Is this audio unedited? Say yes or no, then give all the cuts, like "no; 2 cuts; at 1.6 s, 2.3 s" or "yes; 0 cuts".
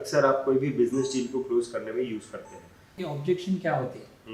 no; 1 cut; at 3.0 s